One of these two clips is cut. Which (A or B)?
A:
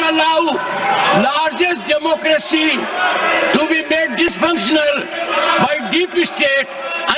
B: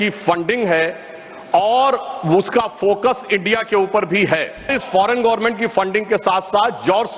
B